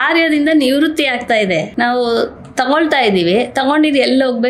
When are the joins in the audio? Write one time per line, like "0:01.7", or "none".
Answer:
0:01.7